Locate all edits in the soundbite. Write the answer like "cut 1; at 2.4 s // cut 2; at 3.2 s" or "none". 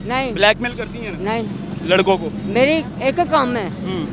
none